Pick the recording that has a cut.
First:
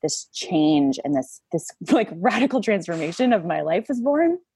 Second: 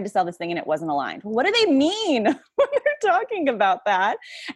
first; 1 cut; at 1.4 s

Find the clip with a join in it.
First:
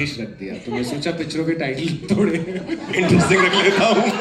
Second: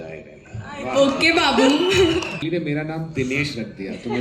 second; 1 cut; at 2.4 s

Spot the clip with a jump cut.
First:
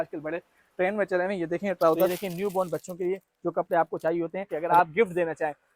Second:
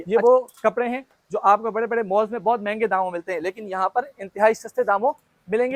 first; 2 cuts; at 2.1 s, 4.5 s

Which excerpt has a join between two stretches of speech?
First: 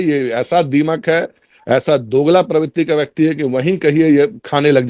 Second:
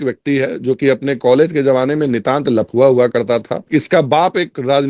second; 1 cut; at 3.6 s

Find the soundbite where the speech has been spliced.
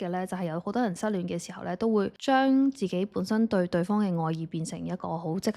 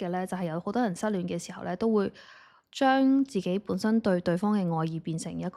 first; 1 cut; at 2.2 s

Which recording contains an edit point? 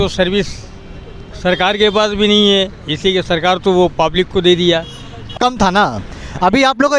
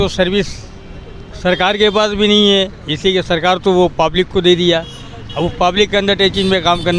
first; 1 cut; at 5.4 s

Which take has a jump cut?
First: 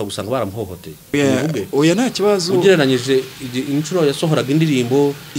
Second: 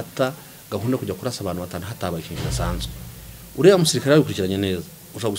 first; 1 cut; at 1.1 s

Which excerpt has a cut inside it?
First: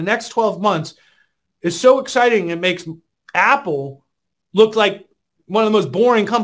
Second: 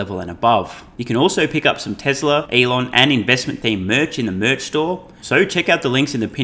second; 3 cuts; at 0.9 s, 2.5 s, 5.1 s

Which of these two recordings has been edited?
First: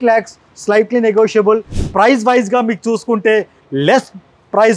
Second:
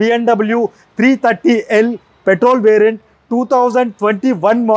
first; 1 cut; at 1.7 s

